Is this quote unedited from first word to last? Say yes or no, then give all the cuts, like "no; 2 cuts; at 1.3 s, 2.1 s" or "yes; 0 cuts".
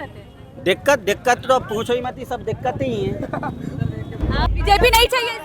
no; 1 cut; at 4.5 s